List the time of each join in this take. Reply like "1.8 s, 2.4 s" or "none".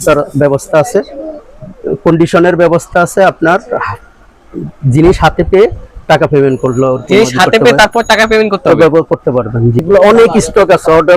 9.9 s